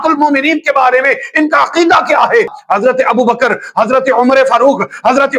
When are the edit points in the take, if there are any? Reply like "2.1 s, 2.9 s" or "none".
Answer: 2.6 s